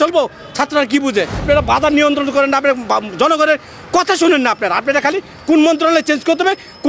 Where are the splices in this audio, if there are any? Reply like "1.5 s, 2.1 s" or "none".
1.4 s